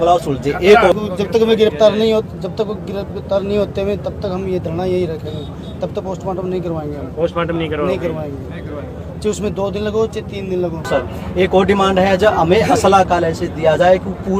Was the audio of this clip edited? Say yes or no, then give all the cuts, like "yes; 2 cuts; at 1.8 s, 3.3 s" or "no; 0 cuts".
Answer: yes; 2 cuts; at 0.9 s, 10.9 s